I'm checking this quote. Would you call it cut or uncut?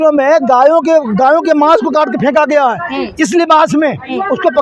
uncut